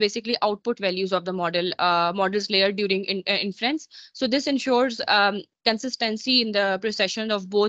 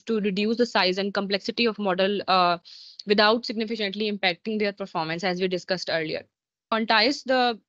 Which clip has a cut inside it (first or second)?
second